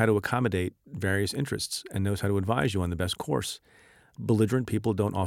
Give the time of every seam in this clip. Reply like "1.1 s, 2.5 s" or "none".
none